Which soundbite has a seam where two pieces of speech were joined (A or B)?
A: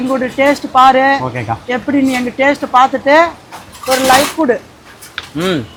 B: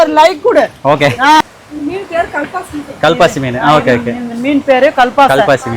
B